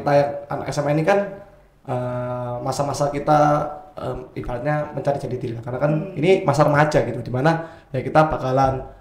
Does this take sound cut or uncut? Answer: uncut